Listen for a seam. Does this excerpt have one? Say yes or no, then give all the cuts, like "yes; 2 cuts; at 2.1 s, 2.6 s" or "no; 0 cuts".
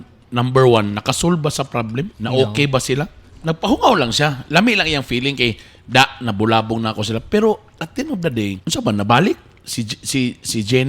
yes; 2 cuts; at 2.2 s, 8.6 s